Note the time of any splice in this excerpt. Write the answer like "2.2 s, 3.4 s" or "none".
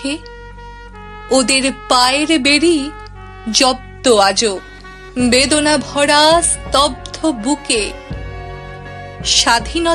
none

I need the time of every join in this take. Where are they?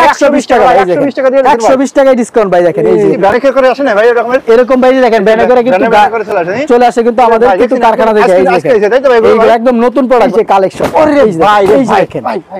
3.2 s, 10.3 s

